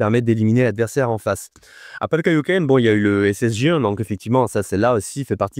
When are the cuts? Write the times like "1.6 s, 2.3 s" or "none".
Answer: none